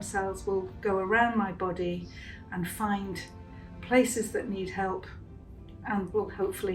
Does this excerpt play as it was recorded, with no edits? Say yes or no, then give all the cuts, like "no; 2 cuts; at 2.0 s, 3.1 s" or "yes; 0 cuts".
yes; 0 cuts